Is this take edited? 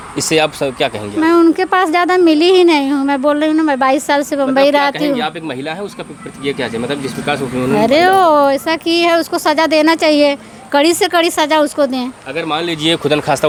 no; 0 cuts

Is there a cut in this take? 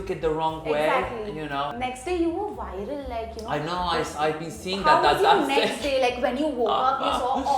yes; 1 cut; at 1.7 s

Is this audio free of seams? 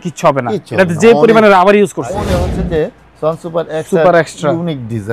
no; 1 cut; at 2.4 s

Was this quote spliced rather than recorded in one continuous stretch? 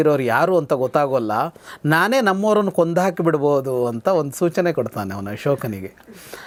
no; 0 cuts

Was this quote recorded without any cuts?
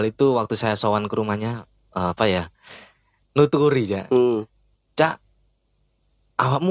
yes; 0 cuts

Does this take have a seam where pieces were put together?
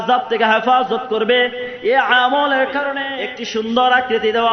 yes; 1 cut; at 3.0 s

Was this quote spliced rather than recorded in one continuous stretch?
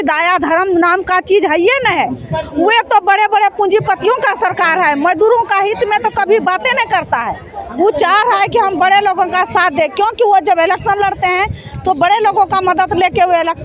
no; 0 cuts

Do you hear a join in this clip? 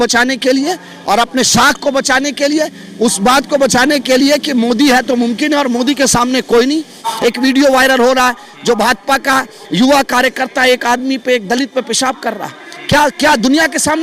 yes; 1 cut; at 7.1 s

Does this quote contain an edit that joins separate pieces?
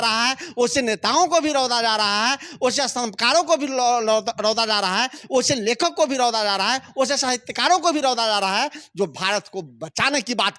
no; 0 cuts

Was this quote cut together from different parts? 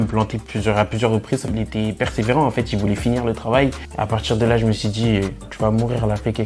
yes; 2 cuts; at 1.5 s, 3.9 s

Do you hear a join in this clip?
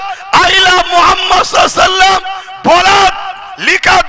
no; 0 cuts

